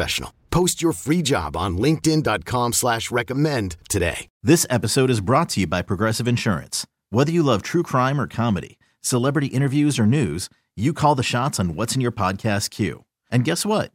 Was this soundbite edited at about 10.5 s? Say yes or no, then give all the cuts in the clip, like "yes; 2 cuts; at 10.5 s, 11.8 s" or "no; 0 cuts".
no; 1 cut; at 4.3 s